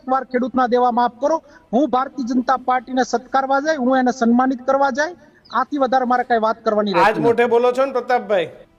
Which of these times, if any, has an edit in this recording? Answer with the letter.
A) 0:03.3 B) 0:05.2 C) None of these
C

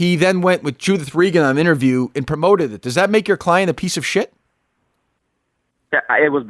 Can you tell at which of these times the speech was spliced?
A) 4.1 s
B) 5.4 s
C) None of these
C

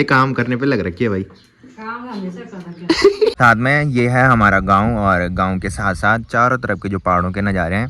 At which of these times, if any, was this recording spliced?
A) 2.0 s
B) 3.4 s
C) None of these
B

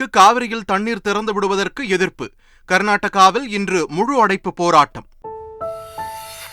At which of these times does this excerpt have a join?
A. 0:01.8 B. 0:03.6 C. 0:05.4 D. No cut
C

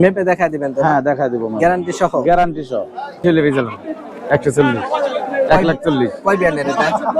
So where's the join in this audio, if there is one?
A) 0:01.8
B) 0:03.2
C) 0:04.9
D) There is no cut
B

